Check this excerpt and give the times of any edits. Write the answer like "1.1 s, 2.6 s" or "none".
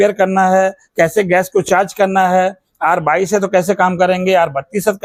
none